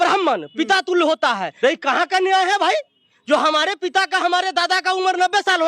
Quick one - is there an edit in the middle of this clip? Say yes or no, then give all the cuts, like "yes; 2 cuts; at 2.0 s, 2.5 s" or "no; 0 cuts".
yes; 1 cut; at 1.5 s